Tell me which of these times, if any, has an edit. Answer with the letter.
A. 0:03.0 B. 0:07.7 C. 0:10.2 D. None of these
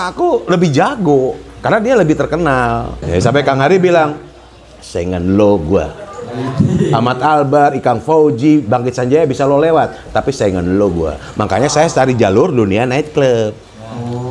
A